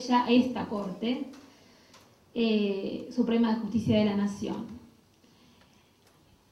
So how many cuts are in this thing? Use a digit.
1